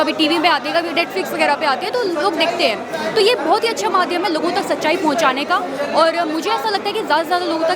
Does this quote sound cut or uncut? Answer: uncut